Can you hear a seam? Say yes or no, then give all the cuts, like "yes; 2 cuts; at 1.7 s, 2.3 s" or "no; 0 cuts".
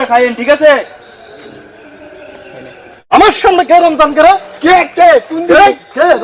yes; 1 cut; at 3.1 s